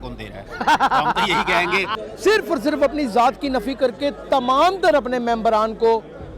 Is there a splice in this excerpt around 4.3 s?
no; 1 cut; at 2.0 s

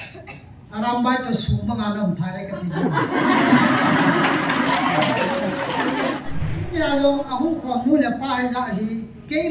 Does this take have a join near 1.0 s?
no; 1 cut; at 6.7 s

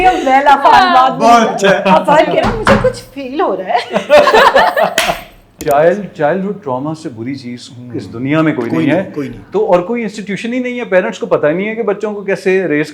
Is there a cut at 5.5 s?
yes; 1 cut; at 5.5 s

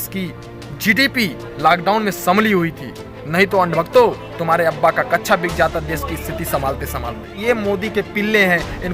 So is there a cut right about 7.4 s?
yes; 1 cut; at 7.4 s

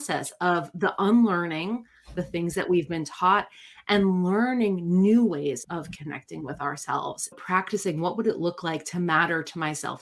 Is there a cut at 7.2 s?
yes; 1 cut; at 7.2 s

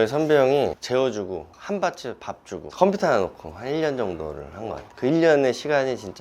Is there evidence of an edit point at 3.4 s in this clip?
no; 0 cuts

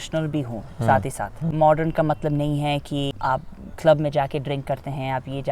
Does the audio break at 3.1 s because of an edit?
yes; 2 cuts; at 1.5 s, 3.1 s

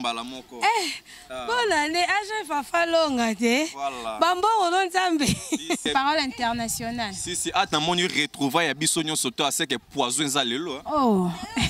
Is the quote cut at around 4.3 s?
no; 1 cut; at 5.8 s

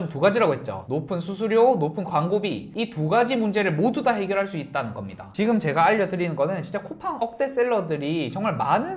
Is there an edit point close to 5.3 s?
yes; 2 cuts; at 5.3 s, 7.2 s

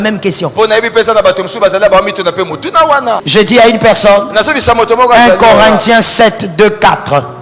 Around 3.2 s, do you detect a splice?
yes; 1 cut; at 3.2 s

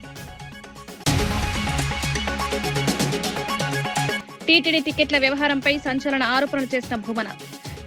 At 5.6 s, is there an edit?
no; 3 cuts; at 1.0 s, 2.6 s, 4.3 s

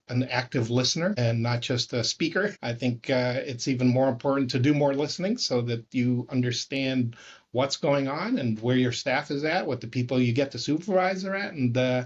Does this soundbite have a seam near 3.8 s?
no; 2 cuts; at 1.2 s, 2.5 s

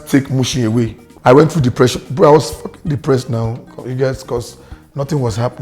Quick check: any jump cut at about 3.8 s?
no; 1 cut; at 1.0 s

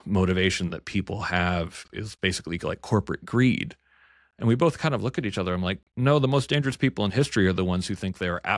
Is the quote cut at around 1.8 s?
yes; 1 cut; at 1.8 s

